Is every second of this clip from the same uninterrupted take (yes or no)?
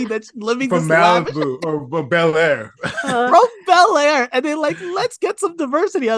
yes